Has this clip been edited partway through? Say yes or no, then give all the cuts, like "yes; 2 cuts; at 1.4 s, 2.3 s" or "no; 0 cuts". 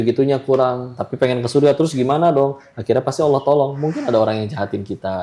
no; 0 cuts